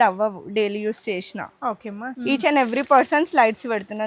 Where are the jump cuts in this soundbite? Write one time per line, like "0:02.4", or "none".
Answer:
0:02.1